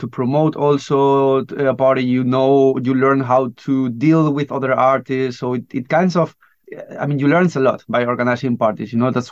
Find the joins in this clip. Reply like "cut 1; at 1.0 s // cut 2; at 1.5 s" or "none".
none